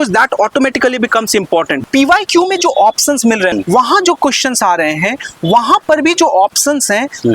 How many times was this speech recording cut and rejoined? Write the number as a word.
two